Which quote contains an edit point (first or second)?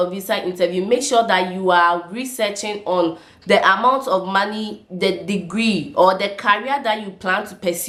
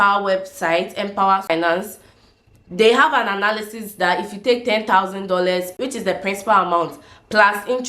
second